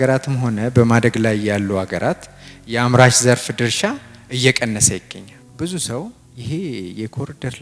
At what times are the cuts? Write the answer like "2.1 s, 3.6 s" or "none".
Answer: 5.4 s, 6.3 s